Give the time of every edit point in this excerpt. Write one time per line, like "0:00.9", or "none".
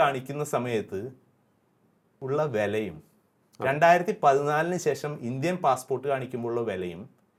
none